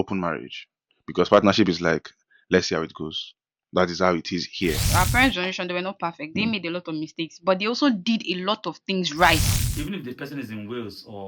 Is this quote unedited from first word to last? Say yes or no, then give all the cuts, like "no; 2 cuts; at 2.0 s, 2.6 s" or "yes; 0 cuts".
no; 2 cuts; at 4.8 s, 9.5 s